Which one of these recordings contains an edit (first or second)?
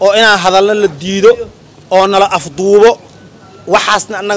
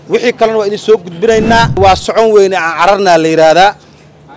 second